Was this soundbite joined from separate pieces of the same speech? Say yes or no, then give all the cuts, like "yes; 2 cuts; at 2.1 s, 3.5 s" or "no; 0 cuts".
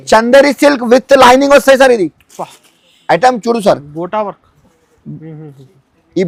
no; 0 cuts